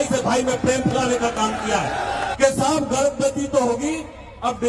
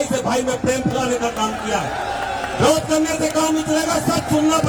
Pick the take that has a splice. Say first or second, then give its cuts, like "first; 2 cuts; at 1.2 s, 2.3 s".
first; 1 cut; at 2.3 s